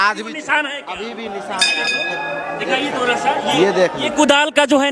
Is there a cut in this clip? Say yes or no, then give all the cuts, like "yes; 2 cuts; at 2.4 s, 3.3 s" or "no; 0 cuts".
no; 0 cuts